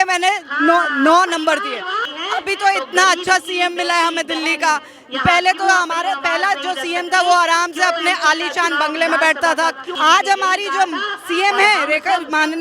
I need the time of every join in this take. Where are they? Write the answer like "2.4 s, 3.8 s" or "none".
2.0 s, 9.9 s